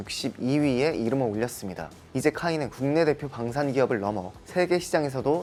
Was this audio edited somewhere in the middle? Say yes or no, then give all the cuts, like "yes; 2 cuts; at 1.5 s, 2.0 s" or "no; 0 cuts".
no; 0 cuts